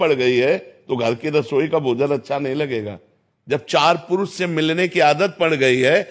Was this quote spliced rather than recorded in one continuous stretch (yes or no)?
no